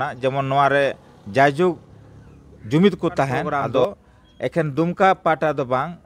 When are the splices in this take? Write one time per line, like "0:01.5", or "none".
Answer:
0:03.7